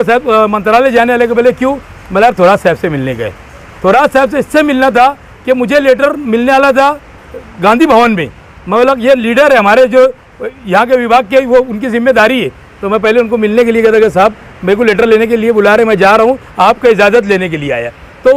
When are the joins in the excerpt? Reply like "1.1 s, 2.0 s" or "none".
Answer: none